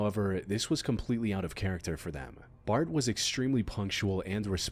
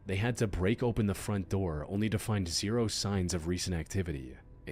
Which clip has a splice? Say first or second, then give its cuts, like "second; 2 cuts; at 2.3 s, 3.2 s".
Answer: second; 1 cut; at 3.6 s